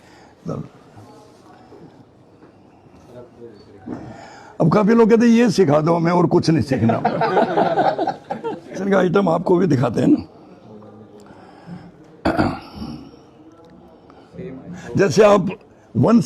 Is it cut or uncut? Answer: cut